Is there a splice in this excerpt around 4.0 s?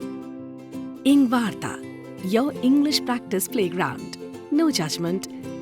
no; 1 cut; at 1.0 s

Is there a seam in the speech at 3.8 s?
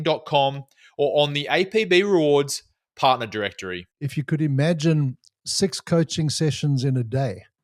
yes; 1 cut; at 3.8 s

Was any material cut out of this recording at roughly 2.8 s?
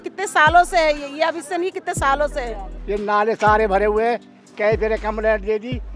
yes; 1 cut; at 2.8 s

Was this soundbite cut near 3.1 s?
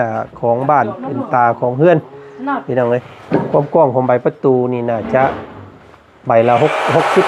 yes; 1 cut; at 3.1 s

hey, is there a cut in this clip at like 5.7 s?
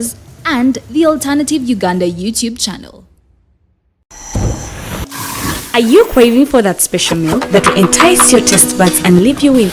no; 1 cut; at 4.1 s

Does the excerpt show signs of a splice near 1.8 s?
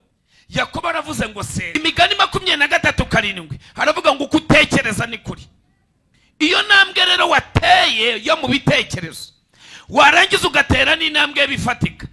yes; 1 cut; at 1.8 s

